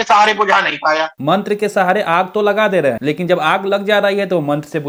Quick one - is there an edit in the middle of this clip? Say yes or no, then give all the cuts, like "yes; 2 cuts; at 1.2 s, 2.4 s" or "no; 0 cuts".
no; 0 cuts